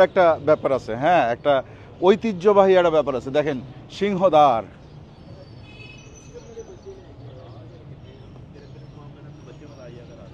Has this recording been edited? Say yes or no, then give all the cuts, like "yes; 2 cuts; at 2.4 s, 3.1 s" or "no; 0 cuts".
no; 0 cuts